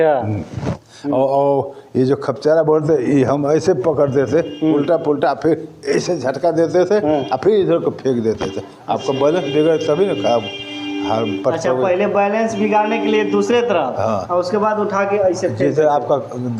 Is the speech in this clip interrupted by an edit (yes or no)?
no